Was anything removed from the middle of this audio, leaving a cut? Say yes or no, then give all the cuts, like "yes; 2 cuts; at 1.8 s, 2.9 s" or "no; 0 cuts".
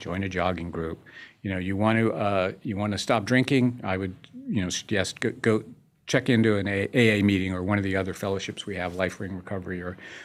no; 0 cuts